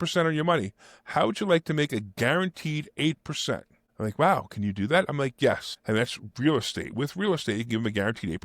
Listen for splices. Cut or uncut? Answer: cut